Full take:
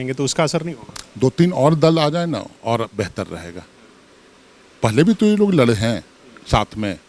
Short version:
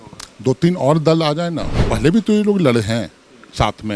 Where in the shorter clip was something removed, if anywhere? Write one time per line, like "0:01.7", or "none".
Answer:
0:01.7